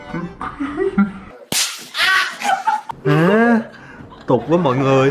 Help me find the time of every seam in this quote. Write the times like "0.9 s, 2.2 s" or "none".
2.9 s